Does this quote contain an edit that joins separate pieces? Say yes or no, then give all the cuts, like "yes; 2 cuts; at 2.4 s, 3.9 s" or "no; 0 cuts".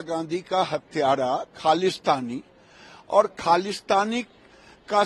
no; 0 cuts